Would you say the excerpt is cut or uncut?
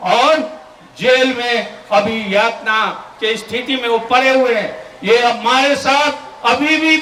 uncut